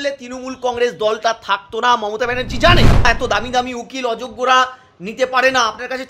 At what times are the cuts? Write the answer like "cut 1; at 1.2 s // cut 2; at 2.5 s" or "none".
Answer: cut 1; at 3.1 s